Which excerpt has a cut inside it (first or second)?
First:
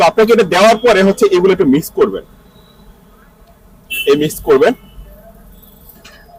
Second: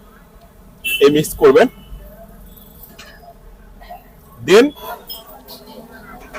second